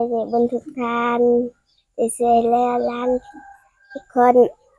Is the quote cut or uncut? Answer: uncut